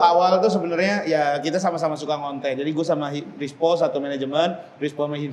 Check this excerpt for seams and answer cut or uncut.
uncut